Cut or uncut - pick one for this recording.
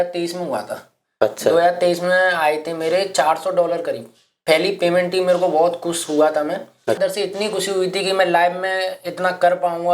cut